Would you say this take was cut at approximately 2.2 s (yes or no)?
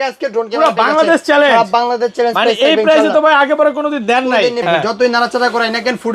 no